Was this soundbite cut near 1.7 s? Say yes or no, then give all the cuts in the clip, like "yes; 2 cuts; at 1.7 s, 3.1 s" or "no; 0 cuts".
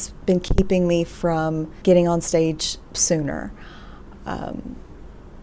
yes; 1 cut; at 1.7 s